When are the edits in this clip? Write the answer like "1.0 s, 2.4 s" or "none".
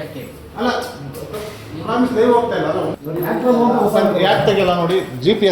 none